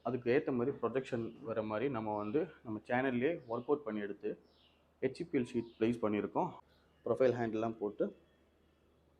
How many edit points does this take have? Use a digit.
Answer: 1